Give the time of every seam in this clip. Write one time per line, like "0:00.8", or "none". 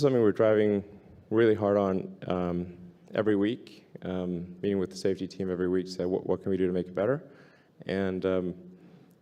none